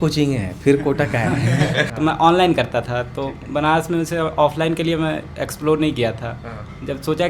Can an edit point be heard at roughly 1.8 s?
yes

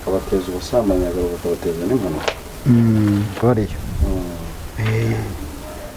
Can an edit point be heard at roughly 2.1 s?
no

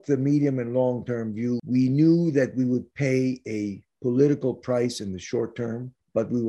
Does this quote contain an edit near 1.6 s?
yes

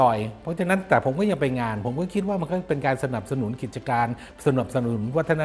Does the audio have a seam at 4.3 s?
no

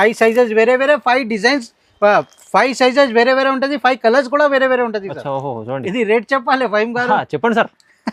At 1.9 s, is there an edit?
no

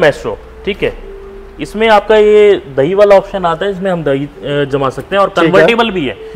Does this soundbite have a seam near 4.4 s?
no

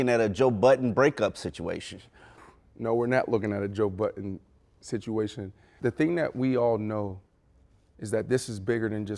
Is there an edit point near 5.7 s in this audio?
yes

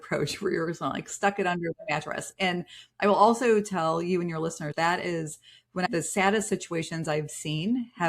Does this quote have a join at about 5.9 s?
yes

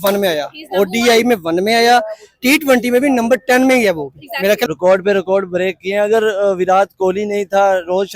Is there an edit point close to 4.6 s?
yes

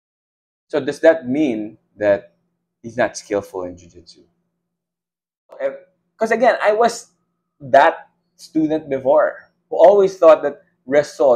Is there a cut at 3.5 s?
no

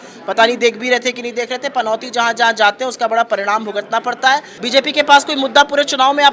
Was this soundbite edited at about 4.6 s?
yes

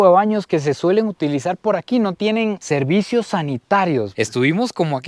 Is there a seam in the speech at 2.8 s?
no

